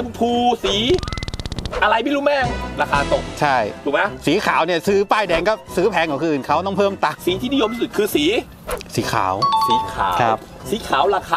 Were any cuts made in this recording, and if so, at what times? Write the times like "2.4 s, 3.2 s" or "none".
7.2 s